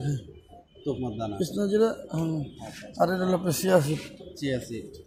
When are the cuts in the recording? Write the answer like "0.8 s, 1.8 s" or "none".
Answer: none